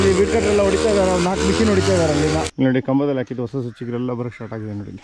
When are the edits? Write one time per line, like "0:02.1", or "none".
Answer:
0:02.5